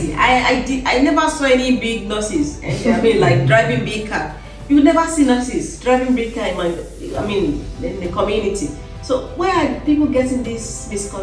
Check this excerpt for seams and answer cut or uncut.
uncut